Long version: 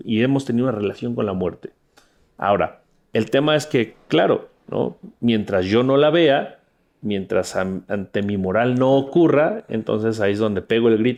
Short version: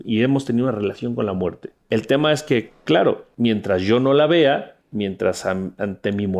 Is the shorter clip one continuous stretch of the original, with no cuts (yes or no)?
no